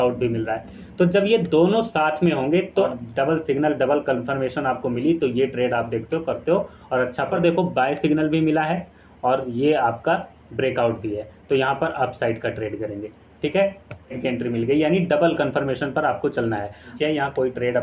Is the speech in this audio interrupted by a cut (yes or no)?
yes